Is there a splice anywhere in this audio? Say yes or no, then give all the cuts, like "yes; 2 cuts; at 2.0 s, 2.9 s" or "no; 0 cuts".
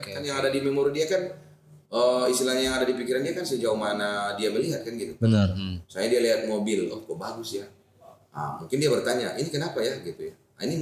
no; 0 cuts